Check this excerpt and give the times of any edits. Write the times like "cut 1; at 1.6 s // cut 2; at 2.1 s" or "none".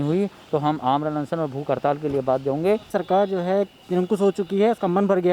cut 1; at 2.9 s